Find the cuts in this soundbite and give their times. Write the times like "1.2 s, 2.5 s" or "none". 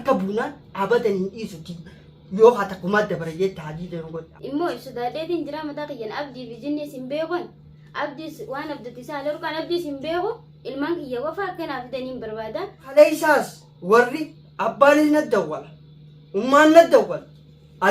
4.1 s, 12.9 s